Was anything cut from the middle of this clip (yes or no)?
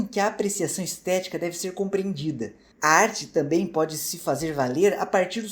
no